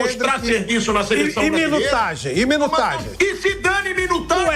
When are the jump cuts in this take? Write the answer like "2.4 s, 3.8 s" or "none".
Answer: 3.0 s